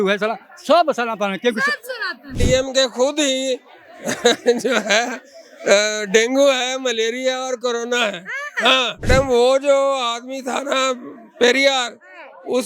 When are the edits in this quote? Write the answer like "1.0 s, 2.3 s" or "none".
2.4 s, 9.0 s